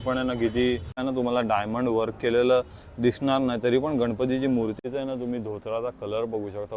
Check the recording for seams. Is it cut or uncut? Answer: cut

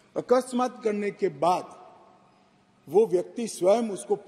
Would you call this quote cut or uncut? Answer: uncut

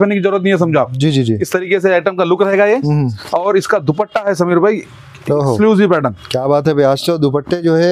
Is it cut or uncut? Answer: uncut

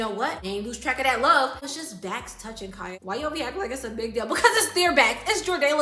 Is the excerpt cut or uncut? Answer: cut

